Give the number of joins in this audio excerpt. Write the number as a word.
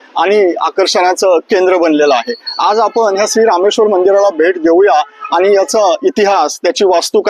zero